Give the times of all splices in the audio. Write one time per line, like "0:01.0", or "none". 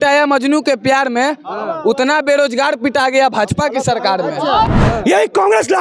0:04.7